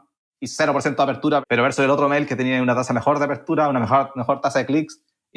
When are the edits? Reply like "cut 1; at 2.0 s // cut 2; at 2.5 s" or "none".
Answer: cut 1; at 1.4 s